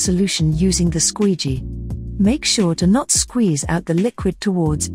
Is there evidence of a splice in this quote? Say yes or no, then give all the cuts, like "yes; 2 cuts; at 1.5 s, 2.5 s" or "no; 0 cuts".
no; 0 cuts